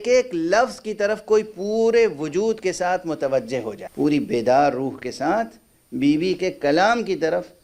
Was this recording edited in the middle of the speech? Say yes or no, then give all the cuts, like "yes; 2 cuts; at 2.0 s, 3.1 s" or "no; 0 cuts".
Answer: no; 0 cuts